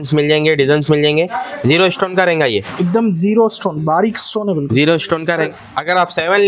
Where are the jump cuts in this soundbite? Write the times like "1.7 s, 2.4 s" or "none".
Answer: 5.4 s